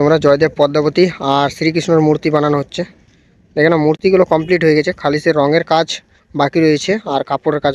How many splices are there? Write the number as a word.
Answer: zero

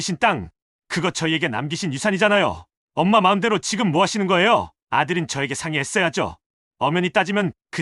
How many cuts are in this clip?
zero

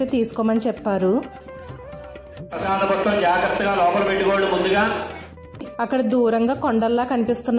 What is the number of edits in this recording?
one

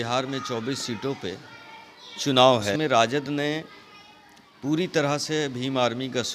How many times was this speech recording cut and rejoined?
one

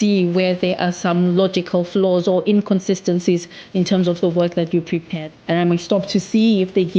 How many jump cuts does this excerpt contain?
one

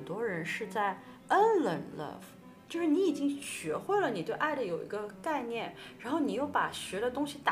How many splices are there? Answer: zero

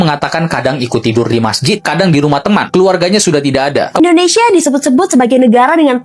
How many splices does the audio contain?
one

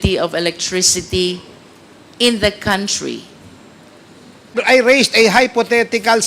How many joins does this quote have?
one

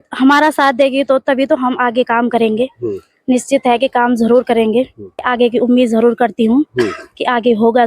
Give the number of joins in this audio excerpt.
one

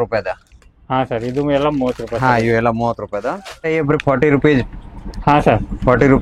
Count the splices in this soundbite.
one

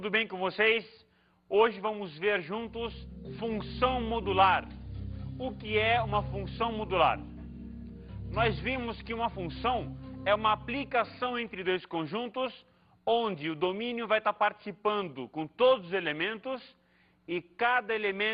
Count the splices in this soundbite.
zero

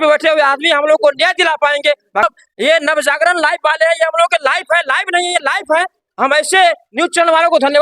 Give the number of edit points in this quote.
one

